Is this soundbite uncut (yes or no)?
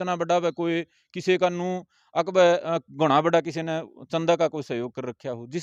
yes